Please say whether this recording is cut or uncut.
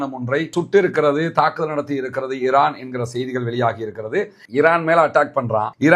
cut